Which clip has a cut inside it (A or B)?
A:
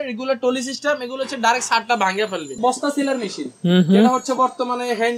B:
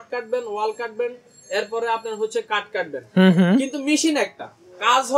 A